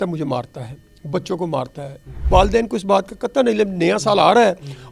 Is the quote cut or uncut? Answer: cut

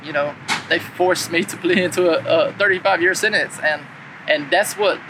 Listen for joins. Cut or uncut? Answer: uncut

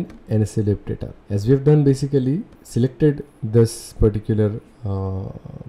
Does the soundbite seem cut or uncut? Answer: cut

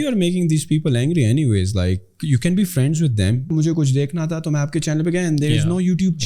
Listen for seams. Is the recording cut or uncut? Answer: cut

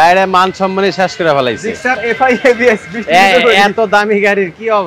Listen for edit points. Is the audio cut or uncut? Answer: uncut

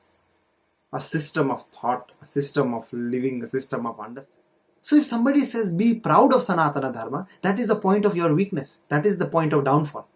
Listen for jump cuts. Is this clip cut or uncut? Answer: cut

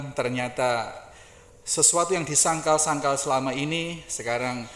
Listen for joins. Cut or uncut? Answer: uncut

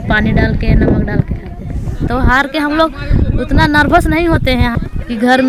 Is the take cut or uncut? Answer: cut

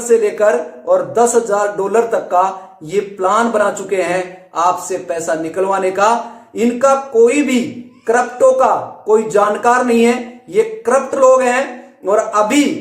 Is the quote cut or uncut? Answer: uncut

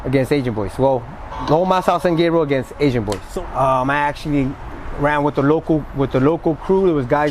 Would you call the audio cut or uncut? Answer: cut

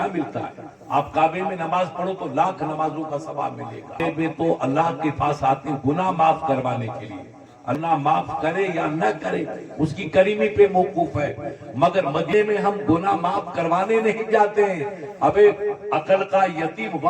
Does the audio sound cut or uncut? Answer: cut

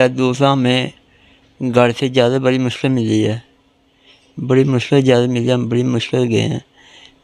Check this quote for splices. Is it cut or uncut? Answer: uncut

